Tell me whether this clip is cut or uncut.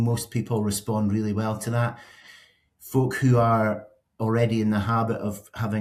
uncut